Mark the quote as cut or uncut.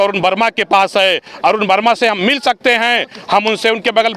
uncut